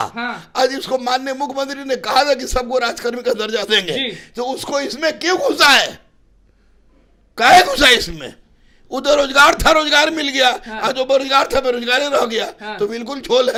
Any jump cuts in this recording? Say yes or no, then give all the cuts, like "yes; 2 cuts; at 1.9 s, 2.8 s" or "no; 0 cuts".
no; 0 cuts